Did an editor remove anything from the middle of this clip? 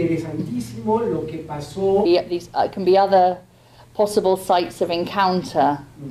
no; 0 cuts

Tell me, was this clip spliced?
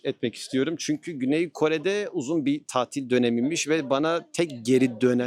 no; 0 cuts

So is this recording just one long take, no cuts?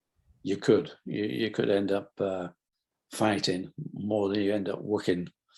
yes; 0 cuts

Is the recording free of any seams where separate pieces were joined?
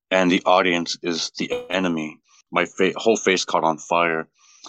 no; 1 cut; at 2.4 s

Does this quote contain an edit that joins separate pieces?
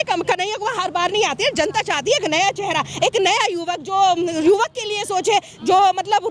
no; 0 cuts

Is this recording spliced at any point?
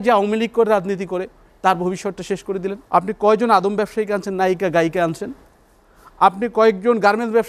yes; 1 cut; at 2.8 s

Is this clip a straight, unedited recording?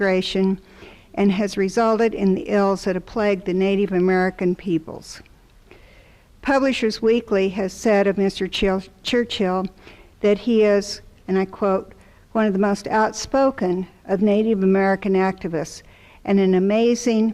no; 1 cut; at 8.2 s

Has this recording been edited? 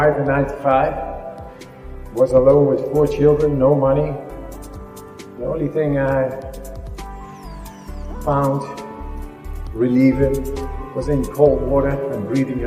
no; 0 cuts

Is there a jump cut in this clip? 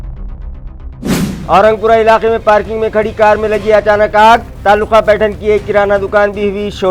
no; 0 cuts

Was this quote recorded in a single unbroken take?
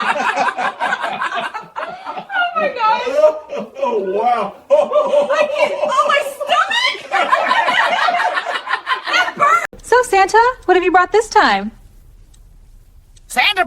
no; 1 cut; at 9.7 s

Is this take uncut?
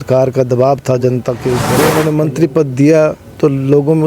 no; 1 cut; at 1.7 s

